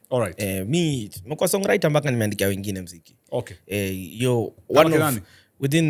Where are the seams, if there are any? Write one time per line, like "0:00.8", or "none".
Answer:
none